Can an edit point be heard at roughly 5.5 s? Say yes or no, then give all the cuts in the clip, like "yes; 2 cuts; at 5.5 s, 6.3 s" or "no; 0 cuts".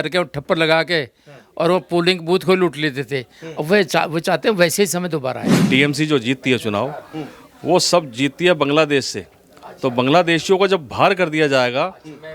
yes; 1 cut; at 5.5 s